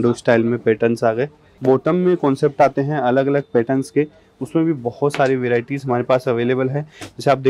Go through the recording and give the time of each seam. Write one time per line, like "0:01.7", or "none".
0:01.4

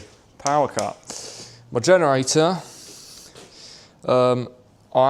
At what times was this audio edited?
none

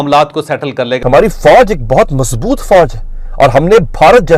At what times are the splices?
0:00.9

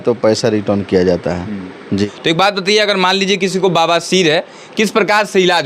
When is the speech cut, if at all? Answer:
0:02.0

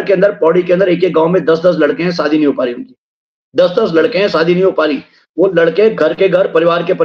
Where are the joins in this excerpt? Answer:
none

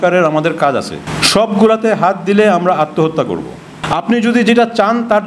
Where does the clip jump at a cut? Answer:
0:01.1
0:03.8

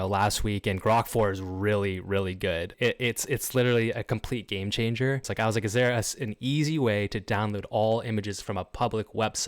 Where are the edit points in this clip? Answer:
0:02.7
0:05.3

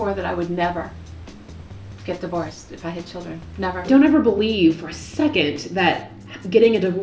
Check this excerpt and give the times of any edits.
0:03.9

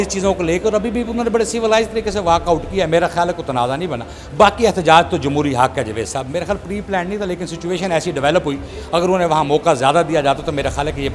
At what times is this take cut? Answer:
none

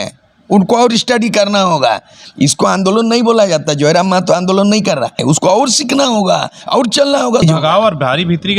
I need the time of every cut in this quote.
0:02.2
0:05.2
0:07.3

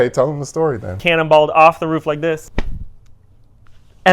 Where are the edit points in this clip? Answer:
0:01.0
0:02.5

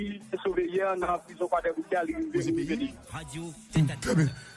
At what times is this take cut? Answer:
0:01.9

